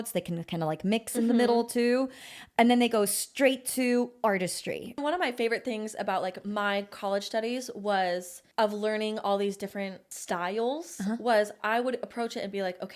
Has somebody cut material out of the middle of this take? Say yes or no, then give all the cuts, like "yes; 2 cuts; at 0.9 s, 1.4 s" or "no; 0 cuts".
yes; 3 cuts; at 5.0 s, 8.4 s, 10.1 s